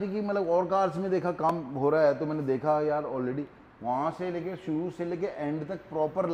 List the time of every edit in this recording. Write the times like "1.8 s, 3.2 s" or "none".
none

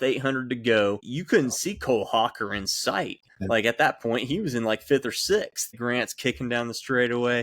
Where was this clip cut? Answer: 1.1 s, 5.8 s

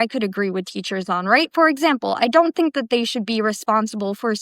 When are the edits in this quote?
1.4 s

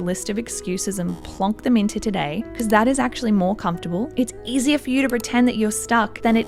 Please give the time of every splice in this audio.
none

